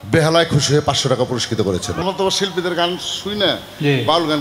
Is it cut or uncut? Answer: cut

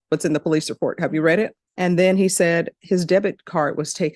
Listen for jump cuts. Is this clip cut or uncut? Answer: cut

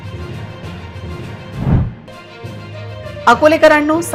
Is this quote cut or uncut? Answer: uncut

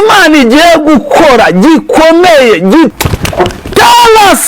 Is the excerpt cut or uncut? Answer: cut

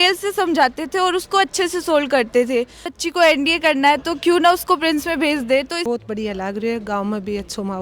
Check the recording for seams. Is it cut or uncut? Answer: cut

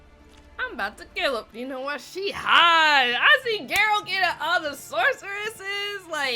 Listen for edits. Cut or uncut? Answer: cut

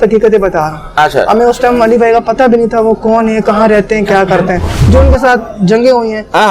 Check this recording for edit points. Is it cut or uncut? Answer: cut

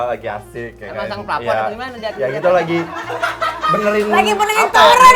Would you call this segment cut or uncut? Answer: uncut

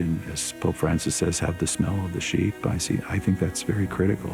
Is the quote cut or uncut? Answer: uncut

